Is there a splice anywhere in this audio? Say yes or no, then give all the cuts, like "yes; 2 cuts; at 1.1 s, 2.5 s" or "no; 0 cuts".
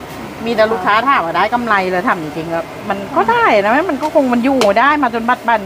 no; 0 cuts